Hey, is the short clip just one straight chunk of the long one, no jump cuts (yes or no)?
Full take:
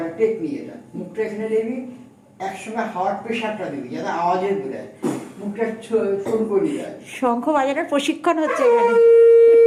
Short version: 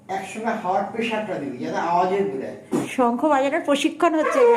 no